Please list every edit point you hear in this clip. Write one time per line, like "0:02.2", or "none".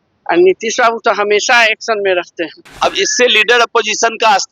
0:02.7